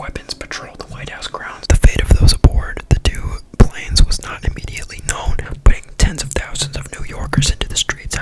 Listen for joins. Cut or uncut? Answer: cut